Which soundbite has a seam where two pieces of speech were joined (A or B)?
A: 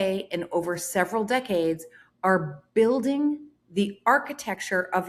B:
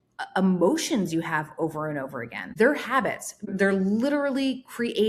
B